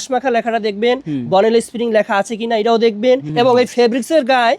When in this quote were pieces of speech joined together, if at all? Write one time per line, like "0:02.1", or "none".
0:03.3